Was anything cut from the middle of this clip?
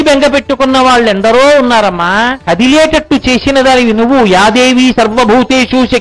yes; 1 cut; at 2.4 s

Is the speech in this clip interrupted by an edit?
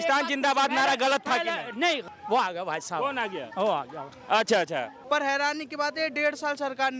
yes; 2 cuts; at 2.0 s, 4.9 s

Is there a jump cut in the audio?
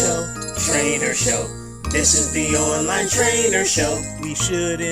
no; 0 cuts

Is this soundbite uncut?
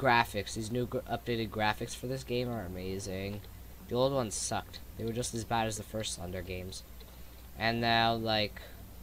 no; 1 cut; at 2.3 s

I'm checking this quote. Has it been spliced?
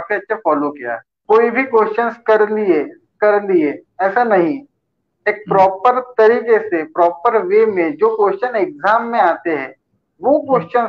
yes; 1 cut; at 1.1 s

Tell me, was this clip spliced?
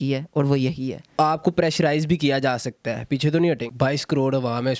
yes; 2 cuts; at 1.1 s, 3.7 s

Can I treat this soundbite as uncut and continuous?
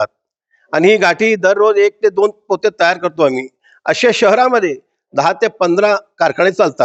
yes; 0 cuts

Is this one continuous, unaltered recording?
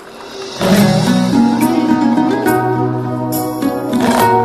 yes; 0 cuts

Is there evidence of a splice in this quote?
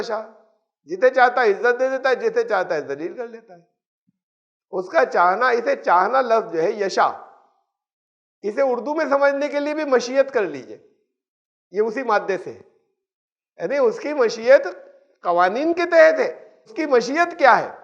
yes; 1 cut; at 16.8 s

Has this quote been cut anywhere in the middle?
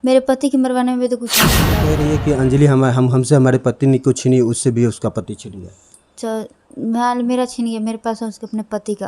yes; 1 cut; at 1.8 s

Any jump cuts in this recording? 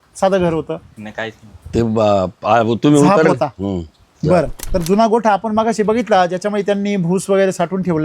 yes; 1 cut; at 4.6 s

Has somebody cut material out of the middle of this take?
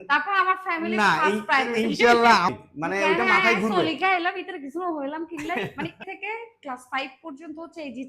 yes; 2 cuts; at 2.6 s, 6.0 s

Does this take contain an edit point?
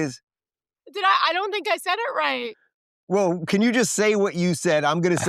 no; 0 cuts

